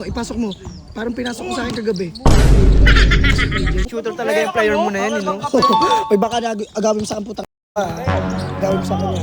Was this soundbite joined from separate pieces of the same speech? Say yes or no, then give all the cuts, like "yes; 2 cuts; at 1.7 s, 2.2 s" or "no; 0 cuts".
yes; 1 cut; at 3.9 s